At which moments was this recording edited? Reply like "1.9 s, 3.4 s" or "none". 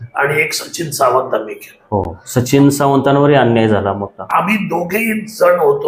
none

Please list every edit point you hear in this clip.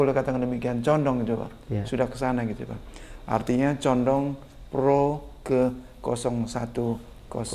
none

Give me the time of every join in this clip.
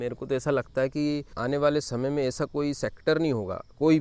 1.3 s

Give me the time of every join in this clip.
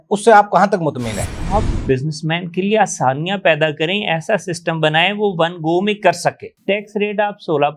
1.4 s

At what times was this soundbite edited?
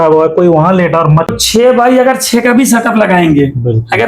1.3 s

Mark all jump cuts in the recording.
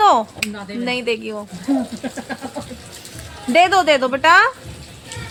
none

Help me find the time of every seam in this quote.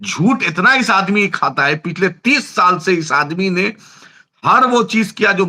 none

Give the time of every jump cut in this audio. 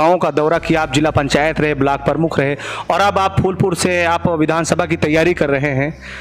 none

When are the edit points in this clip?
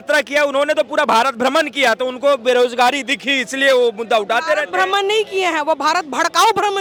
none

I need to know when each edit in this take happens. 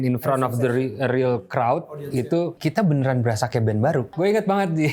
2.5 s, 4.1 s

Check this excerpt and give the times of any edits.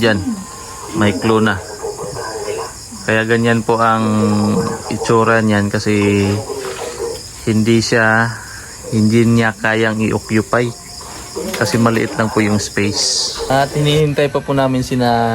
13.5 s

